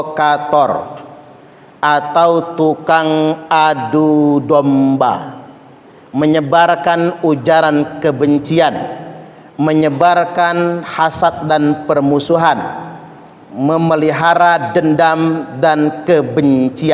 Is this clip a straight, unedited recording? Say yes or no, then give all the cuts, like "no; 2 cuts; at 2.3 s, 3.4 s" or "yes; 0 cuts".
yes; 0 cuts